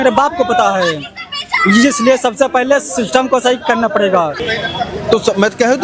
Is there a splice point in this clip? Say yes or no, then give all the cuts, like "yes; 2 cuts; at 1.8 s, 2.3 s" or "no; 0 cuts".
yes; 1 cut; at 4.3 s